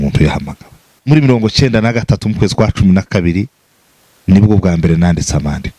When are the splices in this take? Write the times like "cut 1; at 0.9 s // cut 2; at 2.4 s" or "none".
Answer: cut 1; at 1.0 s